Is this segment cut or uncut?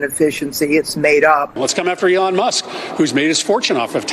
cut